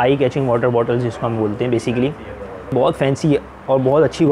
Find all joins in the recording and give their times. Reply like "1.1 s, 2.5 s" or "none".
2.7 s